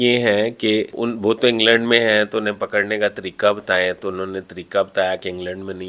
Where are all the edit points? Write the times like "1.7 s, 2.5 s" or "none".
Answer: 1.0 s